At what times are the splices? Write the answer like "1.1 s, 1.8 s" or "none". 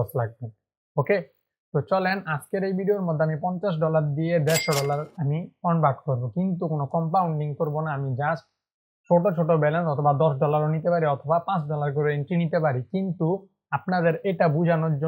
none